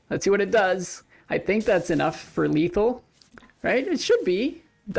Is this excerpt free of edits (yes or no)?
yes